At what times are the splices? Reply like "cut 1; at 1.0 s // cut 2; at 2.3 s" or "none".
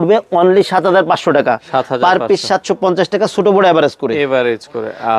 none